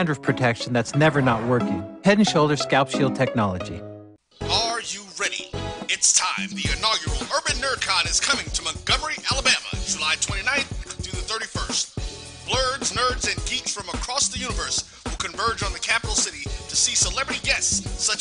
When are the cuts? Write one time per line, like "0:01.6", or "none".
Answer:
0:04.9